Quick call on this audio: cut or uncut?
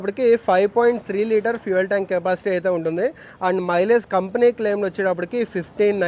uncut